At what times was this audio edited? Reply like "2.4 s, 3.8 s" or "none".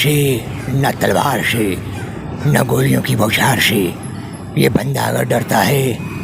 none